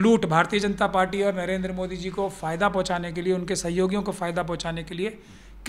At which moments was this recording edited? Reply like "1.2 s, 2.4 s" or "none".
none